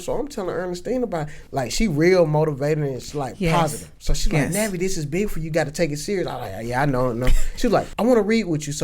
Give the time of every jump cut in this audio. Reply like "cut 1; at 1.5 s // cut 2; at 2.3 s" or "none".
cut 1; at 1.4 s // cut 2; at 7.9 s